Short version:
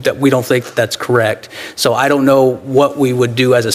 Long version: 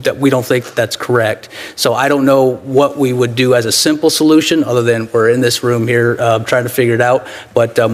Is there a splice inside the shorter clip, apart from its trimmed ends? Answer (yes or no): no